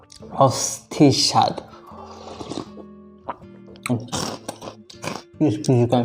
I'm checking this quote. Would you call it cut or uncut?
cut